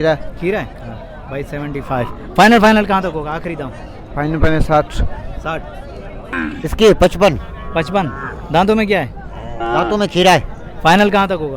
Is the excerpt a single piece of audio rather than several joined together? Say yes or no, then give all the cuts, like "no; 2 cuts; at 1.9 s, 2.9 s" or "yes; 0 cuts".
no; 1 cut; at 6.2 s